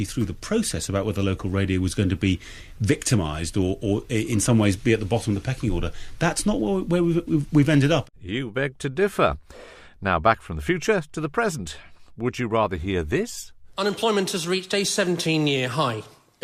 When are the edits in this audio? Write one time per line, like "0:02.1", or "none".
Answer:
0:06.8